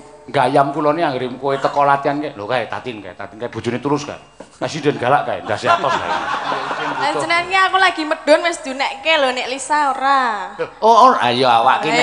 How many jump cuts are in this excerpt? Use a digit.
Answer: 1